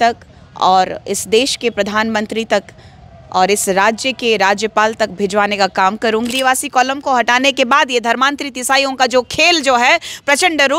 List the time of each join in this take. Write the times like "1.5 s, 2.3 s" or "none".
6.3 s